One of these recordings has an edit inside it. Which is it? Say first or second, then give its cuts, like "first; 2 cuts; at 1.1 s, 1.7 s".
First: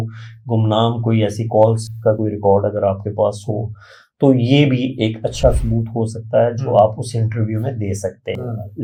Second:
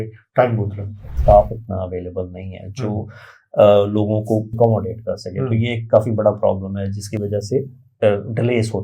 second; 2 cuts; at 1.1 s, 4.6 s